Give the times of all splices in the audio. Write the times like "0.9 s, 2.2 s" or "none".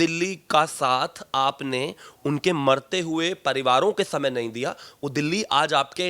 none